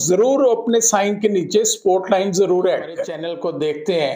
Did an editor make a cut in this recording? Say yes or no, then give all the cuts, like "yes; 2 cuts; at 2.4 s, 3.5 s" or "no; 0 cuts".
yes; 1 cut; at 3.2 s